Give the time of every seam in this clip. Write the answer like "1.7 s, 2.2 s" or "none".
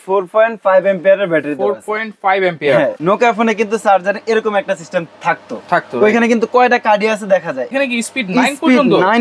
3.0 s, 7.7 s